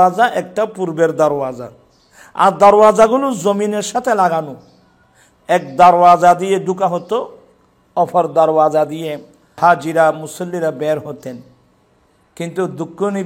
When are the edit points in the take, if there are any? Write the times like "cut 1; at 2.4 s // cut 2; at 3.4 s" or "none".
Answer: cut 1; at 9.6 s